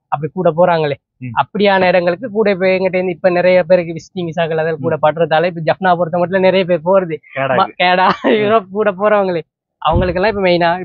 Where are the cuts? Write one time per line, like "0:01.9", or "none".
none